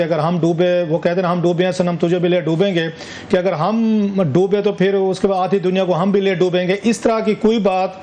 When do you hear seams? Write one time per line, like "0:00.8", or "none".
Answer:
none